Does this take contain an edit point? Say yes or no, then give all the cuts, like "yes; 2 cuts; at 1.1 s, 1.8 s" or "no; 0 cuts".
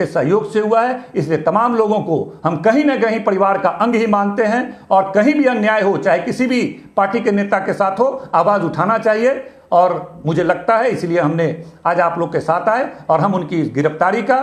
no; 0 cuts